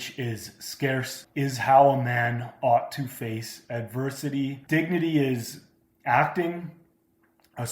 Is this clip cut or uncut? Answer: cut